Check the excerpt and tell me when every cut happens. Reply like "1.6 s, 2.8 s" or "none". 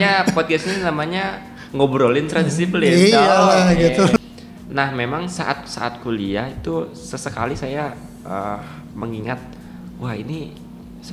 4.2 s